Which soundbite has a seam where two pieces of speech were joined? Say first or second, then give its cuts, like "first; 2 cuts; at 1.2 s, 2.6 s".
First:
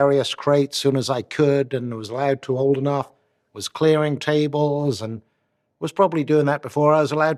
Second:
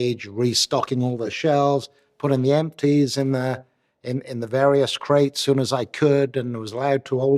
second; 1 cut; at 1.3 s